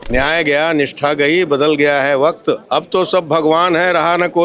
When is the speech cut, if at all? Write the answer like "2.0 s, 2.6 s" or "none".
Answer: 2.6 s